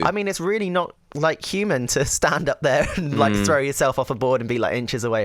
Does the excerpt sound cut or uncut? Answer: uncut